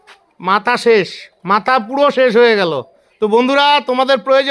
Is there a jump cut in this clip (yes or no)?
no